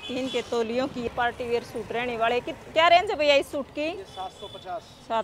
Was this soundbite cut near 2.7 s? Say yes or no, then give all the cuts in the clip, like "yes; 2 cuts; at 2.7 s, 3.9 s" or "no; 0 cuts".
no; 1 cut; at 1.1 s